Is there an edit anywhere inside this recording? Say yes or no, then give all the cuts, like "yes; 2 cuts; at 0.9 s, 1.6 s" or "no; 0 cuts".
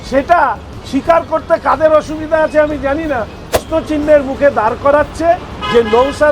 yes; 1 cut; at 3.6 s